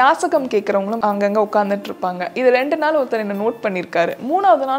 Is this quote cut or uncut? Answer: cut